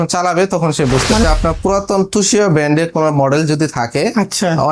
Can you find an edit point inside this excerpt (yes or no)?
yes